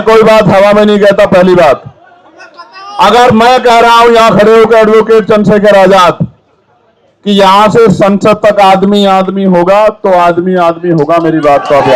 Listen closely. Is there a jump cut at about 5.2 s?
no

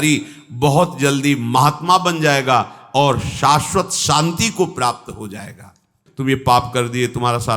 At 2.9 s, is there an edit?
no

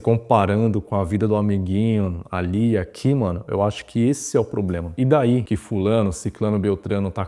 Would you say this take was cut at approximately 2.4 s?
no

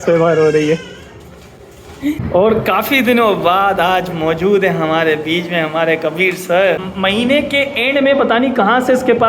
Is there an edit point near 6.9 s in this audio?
yes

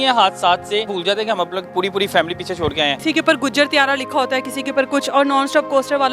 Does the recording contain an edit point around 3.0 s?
yes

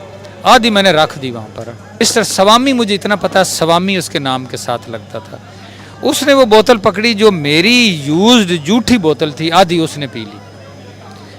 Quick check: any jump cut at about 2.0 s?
yes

